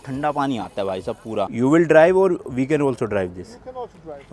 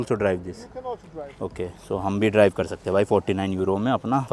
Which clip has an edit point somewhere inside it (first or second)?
first